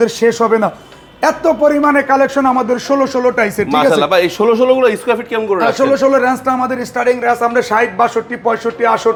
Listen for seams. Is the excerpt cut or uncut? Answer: uncut